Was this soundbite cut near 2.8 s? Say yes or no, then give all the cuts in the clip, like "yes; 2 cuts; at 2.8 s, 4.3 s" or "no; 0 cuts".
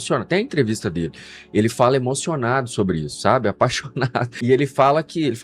no; 1 cut; at 4.4 s